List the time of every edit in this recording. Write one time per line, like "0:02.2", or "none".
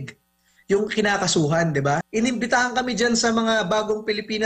0:02.1